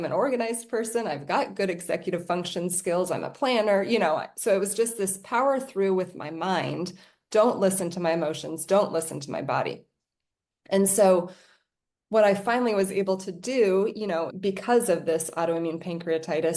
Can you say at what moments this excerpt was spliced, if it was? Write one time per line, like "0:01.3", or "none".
none

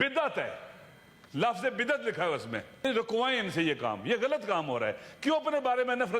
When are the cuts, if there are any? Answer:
0:02.8

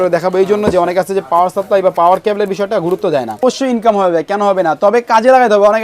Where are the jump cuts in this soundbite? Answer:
0:03.4

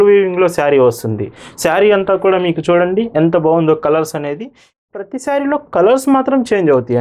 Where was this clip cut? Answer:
0:04.8

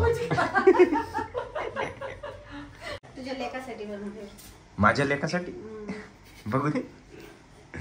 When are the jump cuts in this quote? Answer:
0:03.0

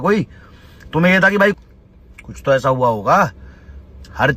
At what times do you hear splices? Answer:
0:01.5

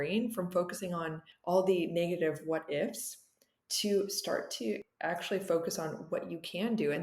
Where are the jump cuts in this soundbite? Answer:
0:01.3

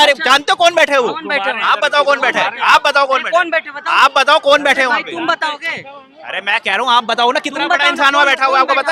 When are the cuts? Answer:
none

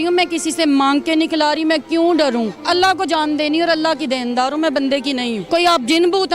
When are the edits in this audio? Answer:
0:02.6
0:05.4

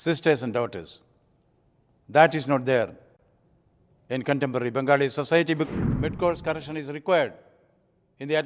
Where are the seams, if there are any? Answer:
0:05.7

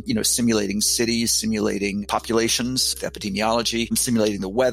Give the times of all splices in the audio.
none

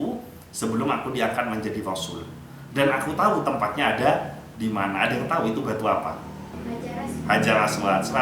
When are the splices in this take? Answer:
0:06.6

